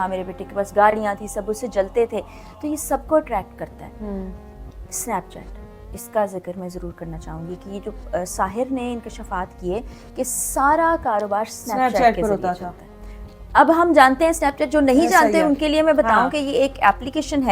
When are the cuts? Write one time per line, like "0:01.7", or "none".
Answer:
none